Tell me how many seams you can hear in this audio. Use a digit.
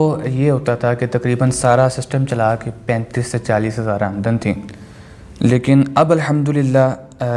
0